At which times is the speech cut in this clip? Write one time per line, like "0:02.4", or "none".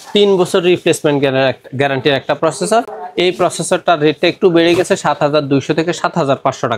none